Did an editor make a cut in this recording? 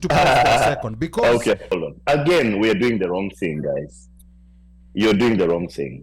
yes; 1 cut; at 1.8 s

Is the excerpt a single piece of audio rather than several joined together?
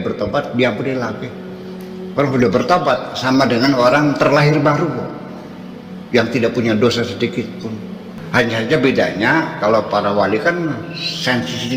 no; 1 cut; at 8.1 s

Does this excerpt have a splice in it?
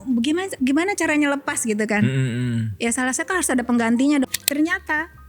yes; 1 cut; at 4.3 s

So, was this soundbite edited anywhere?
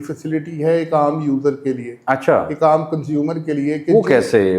no; 0 cuts

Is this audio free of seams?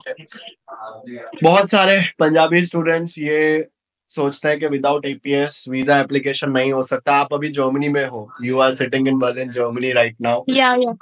yes; 0 cuts

